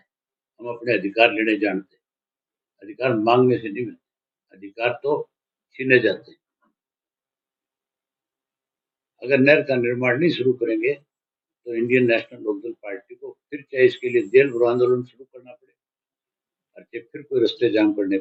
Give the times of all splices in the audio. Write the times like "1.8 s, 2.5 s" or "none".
none